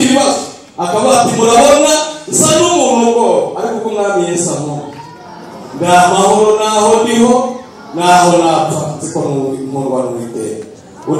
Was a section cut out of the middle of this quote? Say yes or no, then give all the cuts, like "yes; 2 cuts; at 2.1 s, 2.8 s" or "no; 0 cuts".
no; 0 cuts